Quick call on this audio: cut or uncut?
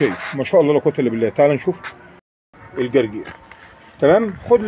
cut